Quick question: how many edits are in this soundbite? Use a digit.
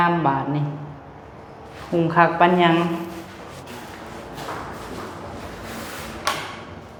0